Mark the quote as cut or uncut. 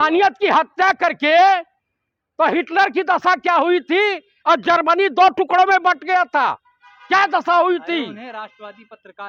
uncut